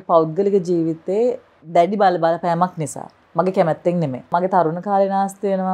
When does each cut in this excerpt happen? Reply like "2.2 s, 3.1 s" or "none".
1.5 s, 4.3 s